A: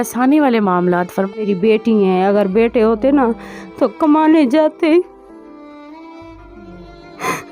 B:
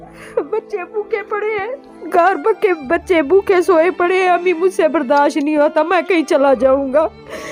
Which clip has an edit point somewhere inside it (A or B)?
A